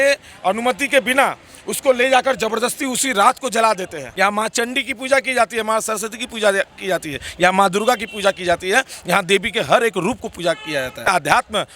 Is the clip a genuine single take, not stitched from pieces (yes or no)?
no